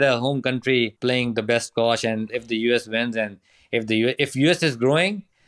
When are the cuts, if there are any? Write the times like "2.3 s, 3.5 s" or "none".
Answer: 0.9 s, 2.3 s